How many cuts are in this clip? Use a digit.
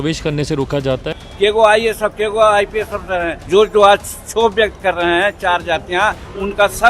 2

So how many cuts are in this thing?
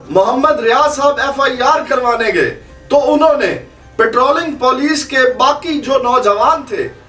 0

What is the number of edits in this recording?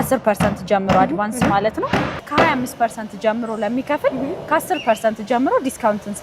1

